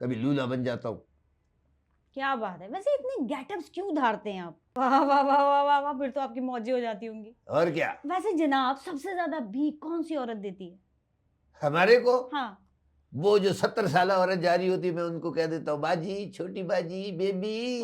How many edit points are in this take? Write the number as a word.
one